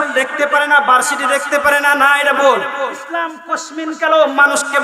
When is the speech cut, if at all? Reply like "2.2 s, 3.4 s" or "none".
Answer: 3.0 s

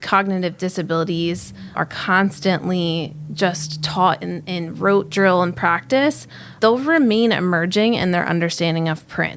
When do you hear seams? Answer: none

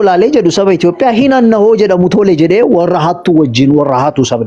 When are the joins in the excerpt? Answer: none

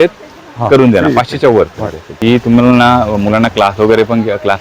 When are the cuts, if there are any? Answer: 2.1 s

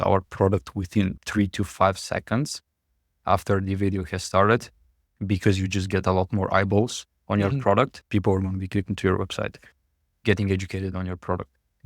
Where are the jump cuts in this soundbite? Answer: 8.0 s

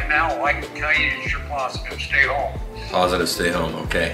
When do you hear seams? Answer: none

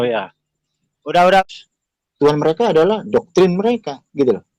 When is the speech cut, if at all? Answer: 1.4 s

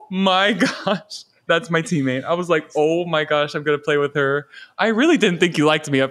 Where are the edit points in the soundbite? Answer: 1.3 s, 4.6 s

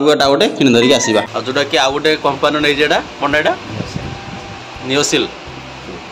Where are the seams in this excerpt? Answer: 1.3 s

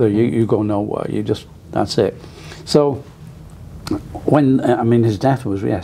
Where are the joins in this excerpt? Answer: none

